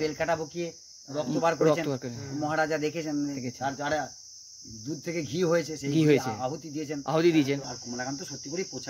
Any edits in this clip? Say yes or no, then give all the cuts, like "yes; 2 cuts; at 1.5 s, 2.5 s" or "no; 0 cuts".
yes; 1 cut; at 7.7 s